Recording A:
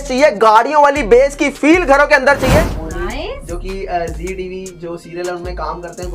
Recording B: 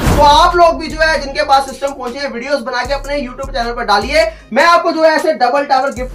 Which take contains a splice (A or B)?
A